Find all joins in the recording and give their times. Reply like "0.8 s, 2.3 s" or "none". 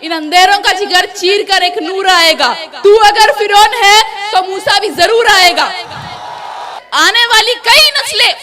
6.8 s